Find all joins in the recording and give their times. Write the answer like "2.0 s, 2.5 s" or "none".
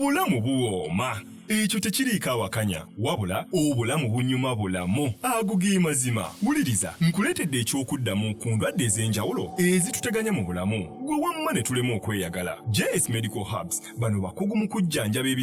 none